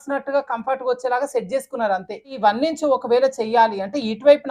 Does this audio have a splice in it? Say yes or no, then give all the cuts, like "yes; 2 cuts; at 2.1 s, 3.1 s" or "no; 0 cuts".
yes; 1 cut; at 2.3 s